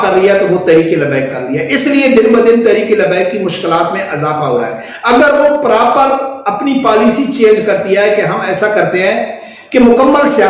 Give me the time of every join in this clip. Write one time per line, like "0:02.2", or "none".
none